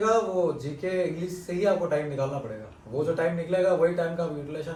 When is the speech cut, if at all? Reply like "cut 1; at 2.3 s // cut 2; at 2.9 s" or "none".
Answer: none